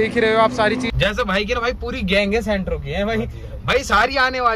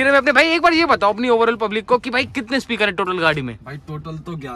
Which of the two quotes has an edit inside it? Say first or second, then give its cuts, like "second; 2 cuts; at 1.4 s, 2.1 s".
first; 1 cut; at 0.9 s